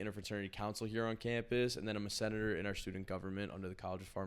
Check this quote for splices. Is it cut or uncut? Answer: uncut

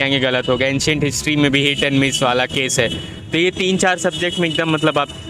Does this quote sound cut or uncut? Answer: uncut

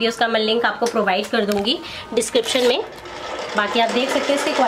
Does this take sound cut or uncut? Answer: uncut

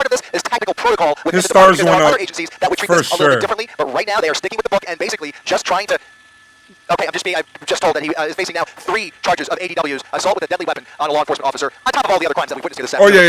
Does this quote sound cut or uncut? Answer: uncut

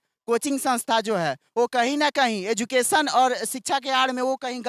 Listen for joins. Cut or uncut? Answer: uncut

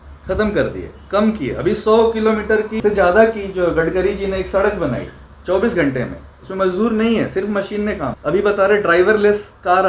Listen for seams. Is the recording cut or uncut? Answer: cut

